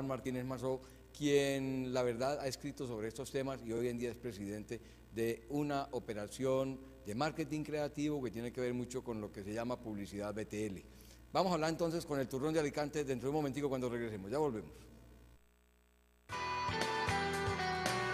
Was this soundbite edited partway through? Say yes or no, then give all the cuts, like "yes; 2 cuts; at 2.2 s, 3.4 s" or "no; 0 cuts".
yes; 1 cut; at 1.4 s